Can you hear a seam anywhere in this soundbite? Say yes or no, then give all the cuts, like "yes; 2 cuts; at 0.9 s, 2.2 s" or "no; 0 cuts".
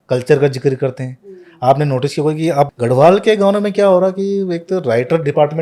yes; 1 cut; at 2.7 s